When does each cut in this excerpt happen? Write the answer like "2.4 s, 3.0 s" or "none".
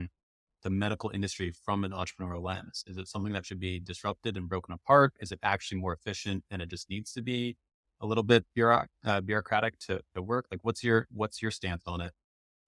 none